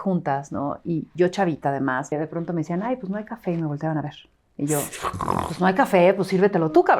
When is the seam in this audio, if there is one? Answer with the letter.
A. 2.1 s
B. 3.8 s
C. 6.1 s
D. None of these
A